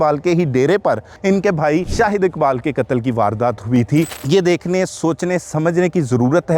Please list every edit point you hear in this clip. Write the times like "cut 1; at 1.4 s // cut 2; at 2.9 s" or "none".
cut 1; at 1.1 s // cut 2; at 1.9 s // cut 3; at 4.2 s